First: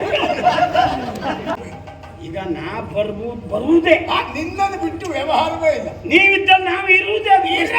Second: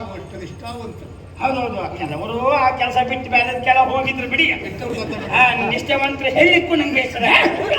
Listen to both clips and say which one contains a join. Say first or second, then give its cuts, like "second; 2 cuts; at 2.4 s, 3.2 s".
first; 1 cut; at 1.6 s